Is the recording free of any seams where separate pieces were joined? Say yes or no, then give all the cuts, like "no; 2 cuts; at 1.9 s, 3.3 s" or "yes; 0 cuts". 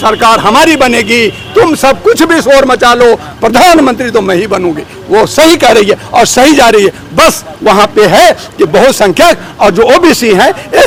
yes; 0 cuts